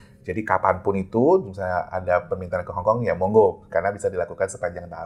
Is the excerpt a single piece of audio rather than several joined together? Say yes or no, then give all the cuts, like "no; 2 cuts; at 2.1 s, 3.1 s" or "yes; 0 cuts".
yes; 0 cuts